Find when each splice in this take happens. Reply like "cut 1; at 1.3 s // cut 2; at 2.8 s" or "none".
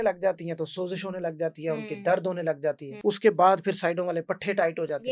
cut 1; at 2.9 s